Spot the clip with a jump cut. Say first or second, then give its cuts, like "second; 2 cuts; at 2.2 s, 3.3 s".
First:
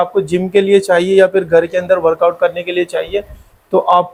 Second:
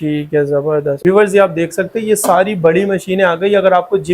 second; 1 cut; at 1.0 s